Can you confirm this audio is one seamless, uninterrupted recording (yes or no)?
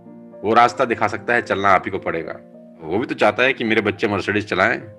no